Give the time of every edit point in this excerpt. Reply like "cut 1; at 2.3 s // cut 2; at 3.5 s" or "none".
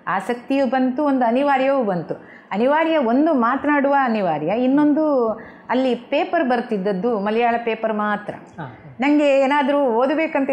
none